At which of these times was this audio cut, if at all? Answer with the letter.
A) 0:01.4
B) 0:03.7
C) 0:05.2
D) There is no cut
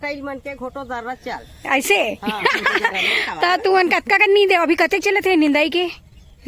D